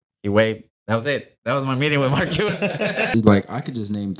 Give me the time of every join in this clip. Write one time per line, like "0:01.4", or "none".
0:03.1